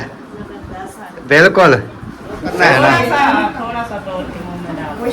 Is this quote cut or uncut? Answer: cut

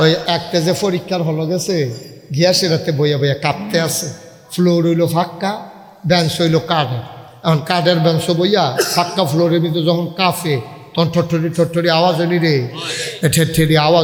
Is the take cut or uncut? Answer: uncut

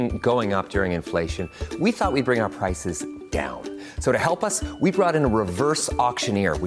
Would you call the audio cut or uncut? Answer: uncut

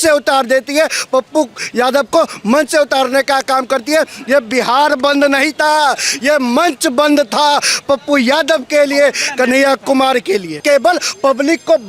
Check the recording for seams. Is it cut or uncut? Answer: cut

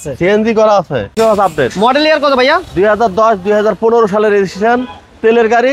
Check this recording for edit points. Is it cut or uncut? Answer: cut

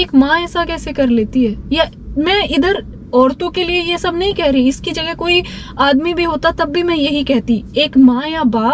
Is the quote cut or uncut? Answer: uncut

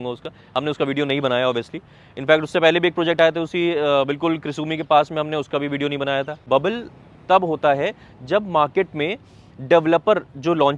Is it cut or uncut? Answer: cut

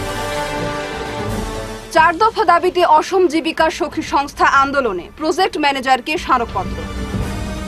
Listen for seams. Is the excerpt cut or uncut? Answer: cut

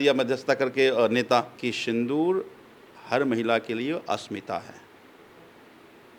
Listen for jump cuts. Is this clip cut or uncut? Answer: cut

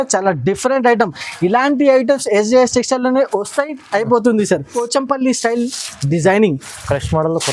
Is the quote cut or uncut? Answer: cut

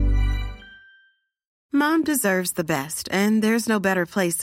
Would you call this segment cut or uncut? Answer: cut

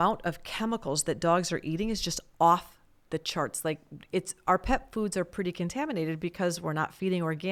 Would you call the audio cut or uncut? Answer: uncut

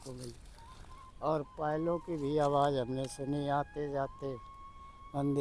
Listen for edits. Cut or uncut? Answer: uncut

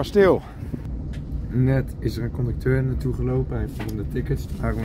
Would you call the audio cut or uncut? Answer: cut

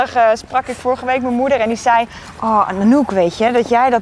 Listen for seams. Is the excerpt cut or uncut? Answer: uncut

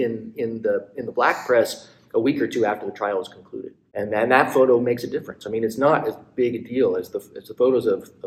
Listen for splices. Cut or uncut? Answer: cut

